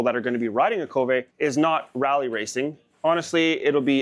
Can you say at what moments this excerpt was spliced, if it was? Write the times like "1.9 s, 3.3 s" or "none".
1.3 s, 2.8 s